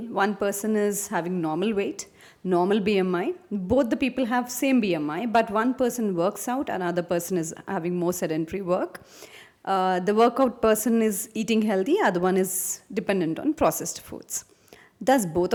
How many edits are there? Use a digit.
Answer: 0